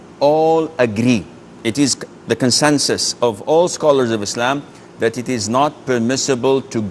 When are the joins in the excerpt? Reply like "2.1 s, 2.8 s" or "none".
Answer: 5.7 s